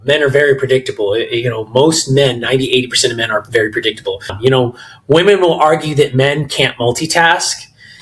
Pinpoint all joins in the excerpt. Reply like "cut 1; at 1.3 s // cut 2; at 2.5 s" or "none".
cut 1; at 4.3 s

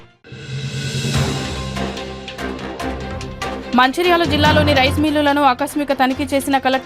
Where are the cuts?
cut 1; at 3.6 s

